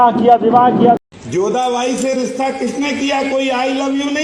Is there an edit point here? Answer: yes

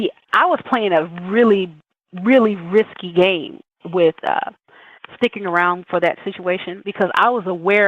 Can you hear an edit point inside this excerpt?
yes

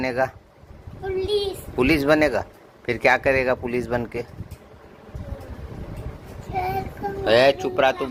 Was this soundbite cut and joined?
no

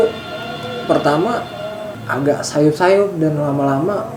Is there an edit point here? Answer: no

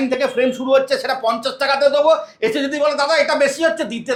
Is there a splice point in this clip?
no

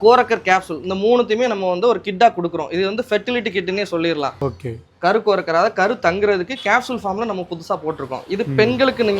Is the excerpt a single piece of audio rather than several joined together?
no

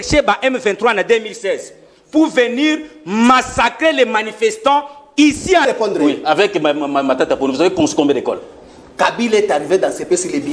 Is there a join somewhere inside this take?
yes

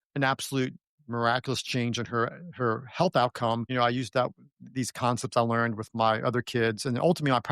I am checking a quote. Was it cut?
yes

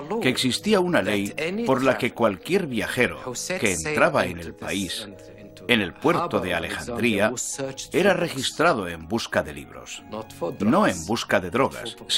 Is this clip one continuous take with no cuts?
no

